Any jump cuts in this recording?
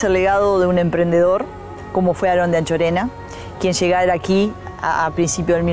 no; 0 cuts

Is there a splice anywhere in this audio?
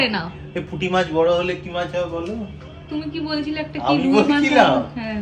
no; 0 cuts

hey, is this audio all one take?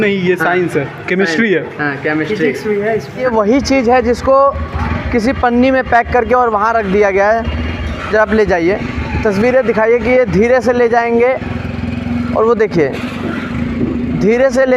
no; 1 cut; at 3.2 s

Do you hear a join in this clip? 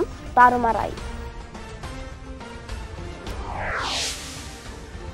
no; 0 cuts

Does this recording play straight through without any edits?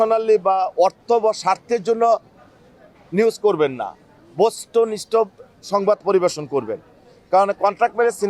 yes; 0 cuts

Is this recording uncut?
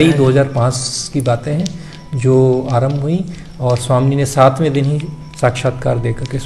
yes; 0 cuts

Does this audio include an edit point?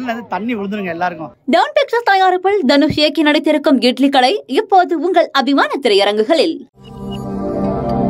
yes; 1 cut; at 1.3 s

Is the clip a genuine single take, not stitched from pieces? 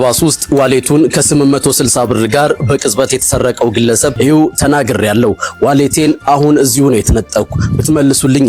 no; 1 cut; at 4.1 s

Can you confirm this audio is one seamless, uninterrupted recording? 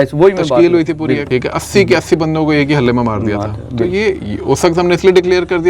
no; 1 cut; at 1.2 s

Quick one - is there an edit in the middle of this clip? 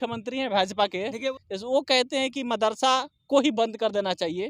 yes; 1 cut; at 1.3 s

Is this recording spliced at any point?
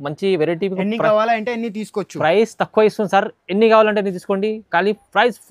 no; 0 cuts

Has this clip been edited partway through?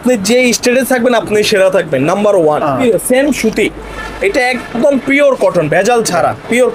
yes; 1 cut; at 2.8 s

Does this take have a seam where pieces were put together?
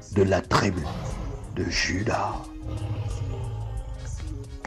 no; 0 cuts

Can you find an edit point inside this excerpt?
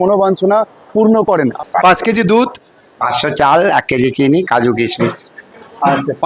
yes; 1 cut; at 1.6 s

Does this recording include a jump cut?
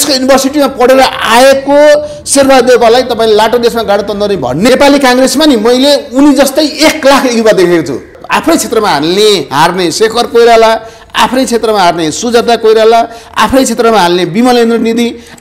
yes; 2 cuts; at 4.7 s, 8.1 s

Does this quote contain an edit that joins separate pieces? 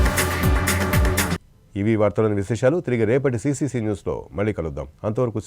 no; 0 cuts

